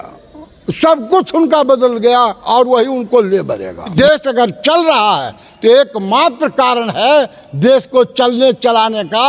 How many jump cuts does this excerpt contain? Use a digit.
1